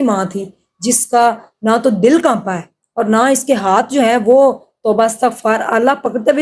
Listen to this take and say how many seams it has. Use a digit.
0